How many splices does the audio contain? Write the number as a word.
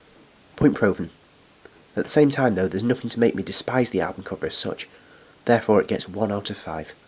one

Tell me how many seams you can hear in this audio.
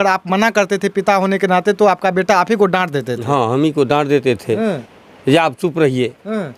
zero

